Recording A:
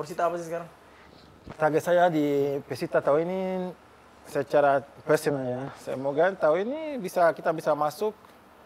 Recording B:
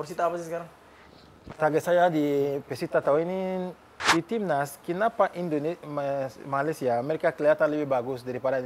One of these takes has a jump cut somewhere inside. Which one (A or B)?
B